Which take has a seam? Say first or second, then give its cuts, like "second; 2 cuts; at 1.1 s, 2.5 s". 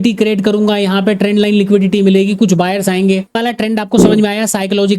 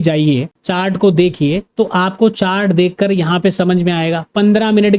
first; 1 cut; at 3.4 s